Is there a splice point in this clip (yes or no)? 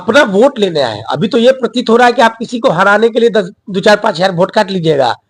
no